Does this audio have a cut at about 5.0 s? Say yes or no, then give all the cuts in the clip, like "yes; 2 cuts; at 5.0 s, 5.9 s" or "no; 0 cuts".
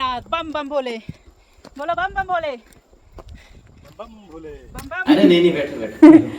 yes; 1 cut; at 5.0 s